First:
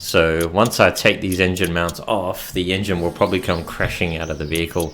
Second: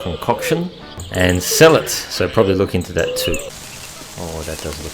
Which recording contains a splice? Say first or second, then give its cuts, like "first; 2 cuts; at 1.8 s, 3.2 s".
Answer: second; 1 cut; at 3.5 s